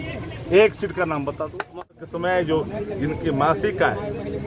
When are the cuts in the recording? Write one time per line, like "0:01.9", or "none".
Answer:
0:01.9